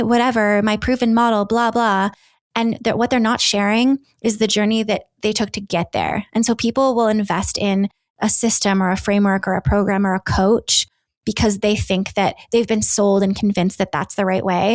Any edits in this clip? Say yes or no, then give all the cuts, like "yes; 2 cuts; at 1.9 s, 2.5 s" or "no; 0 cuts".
no; 0 cuts